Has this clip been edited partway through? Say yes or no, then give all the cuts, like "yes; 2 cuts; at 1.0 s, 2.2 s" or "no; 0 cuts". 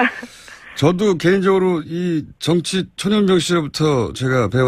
no; 0 cuts